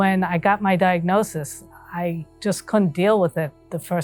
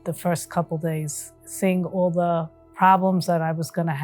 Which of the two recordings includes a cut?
second; 2 cuts; at 1.4 s, 2.6 s

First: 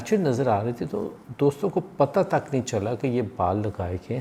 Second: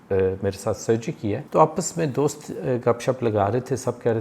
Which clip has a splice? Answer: second; 1 cut; at 1.4 s

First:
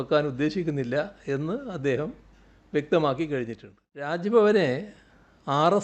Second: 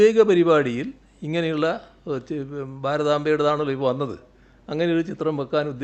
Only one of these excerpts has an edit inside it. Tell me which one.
first; 1 cut; at 4.1 s

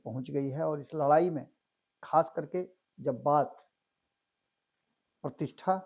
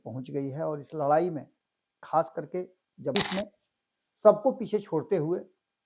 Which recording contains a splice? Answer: second; 1 cut; at 3.1 s

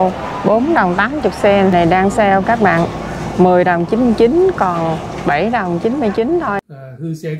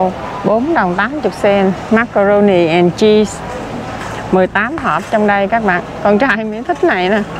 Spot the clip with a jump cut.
first; 2 cuts; at 1.7 s, 6.6 s

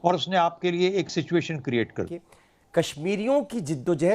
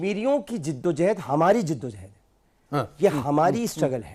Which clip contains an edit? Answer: first; 1 cut; at 2.1 s

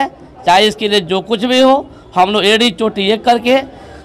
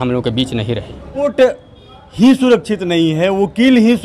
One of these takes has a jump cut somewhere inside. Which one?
second; 1 cut; at 1.3 s

